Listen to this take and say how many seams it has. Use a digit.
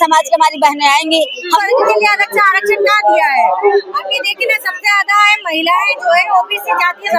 1